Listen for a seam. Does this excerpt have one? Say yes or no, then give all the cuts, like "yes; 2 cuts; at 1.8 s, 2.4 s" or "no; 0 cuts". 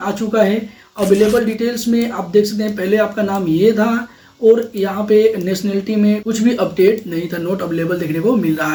no; 0 cuts